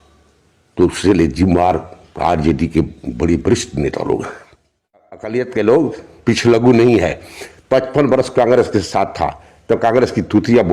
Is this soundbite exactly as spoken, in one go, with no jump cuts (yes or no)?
no